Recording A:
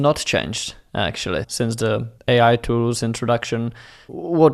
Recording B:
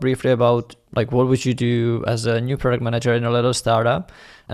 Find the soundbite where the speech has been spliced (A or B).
A